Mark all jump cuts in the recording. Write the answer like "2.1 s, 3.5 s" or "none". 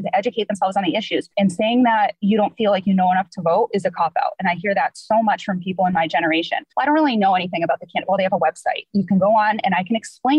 1.3 s, 2.2 s, 6.6 s